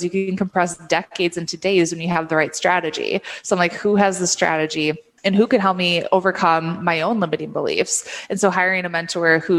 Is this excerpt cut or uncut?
uncut